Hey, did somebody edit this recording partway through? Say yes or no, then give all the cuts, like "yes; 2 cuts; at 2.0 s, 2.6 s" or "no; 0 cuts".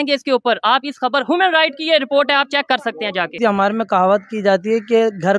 yes; 1 cut; at 3.3 s